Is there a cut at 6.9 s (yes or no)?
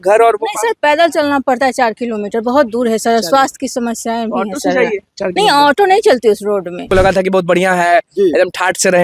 yes